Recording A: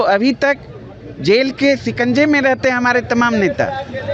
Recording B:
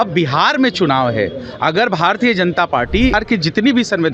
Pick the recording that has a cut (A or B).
B